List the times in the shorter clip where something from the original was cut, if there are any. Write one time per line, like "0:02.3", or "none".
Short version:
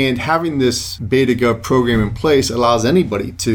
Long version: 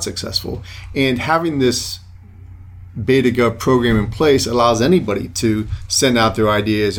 0:00.9